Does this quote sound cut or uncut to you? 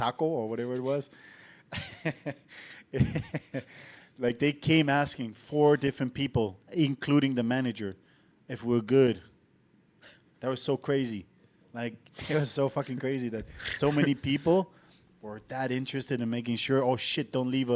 uncut